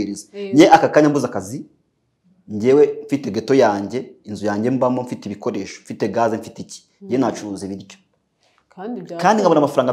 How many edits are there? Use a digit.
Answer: 0